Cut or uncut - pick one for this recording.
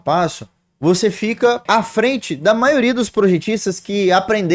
cut